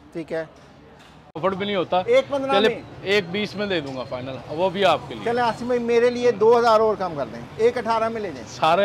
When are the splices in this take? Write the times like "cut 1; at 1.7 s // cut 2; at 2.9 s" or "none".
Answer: cut 1; at 1.4 s

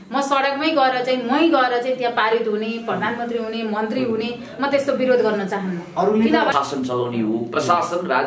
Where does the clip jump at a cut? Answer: cut 1; at 6.5 s

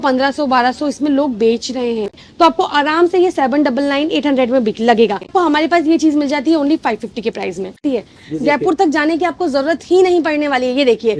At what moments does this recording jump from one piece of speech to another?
cut 1; at 2.2 s // cut 2; at 5.3 s // cut 3; at 7.8 s

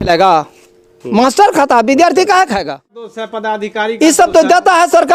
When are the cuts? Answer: none

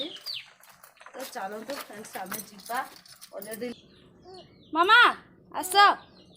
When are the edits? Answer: cut 1; at 3.7 s

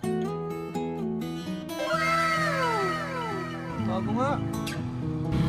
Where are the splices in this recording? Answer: none

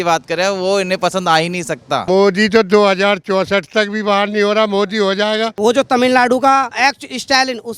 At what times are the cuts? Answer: cut 1; at 2.0 s // cut 2; at 5.5 s // cut 3; at 6.7 s

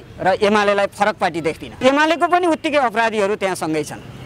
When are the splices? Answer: cut 1; at 1.7 s

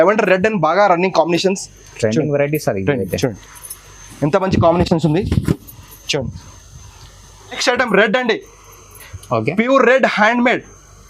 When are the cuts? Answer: cut 1; at 7.5 s

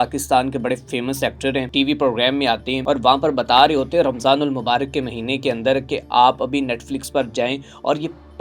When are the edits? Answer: cut 1; at 1.7 s // cut 2; at 2.7 s

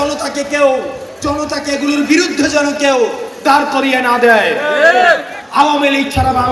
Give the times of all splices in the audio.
cut 1; at 5.4 s

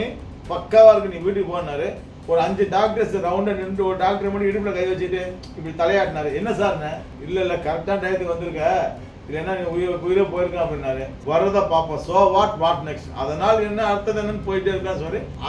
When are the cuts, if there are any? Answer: cut 1; at 2.1 s // cut 2; at 11.2 s

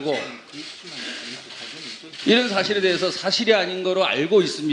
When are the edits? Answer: cut 1; at 1.1 s

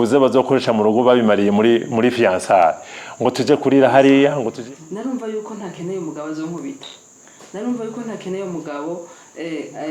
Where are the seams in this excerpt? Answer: cut 1; at 4.5 s

